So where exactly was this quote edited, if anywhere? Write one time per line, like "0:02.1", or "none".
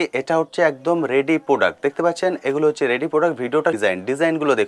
0:03.8